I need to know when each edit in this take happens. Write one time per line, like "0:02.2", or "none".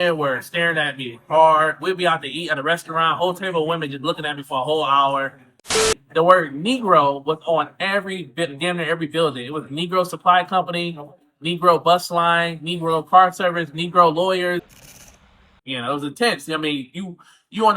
0:05.9
0:15.0